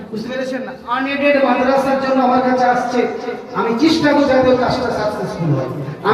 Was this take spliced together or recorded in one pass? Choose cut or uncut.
uncut